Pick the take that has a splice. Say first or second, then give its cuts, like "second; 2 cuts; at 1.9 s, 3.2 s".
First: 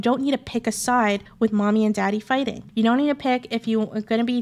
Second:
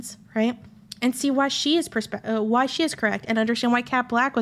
first; 2 cuts; at 1.3 s, 2.6 s